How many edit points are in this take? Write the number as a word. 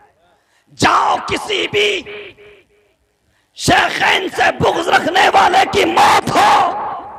zero